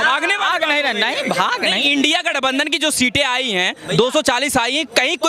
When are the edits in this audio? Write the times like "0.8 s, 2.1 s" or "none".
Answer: none